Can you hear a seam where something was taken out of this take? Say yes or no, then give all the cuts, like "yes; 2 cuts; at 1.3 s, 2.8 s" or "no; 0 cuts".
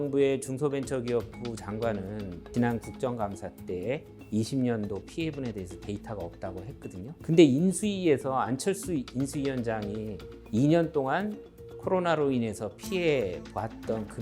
yes; 2 cuts; at 2.5 s, 7.2 s